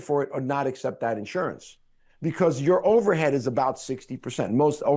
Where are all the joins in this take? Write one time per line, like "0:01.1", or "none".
none